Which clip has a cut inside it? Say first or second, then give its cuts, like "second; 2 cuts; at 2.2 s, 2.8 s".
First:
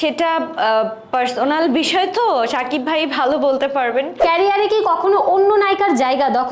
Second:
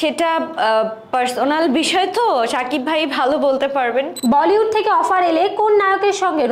second; 1 cut; at 4.1 s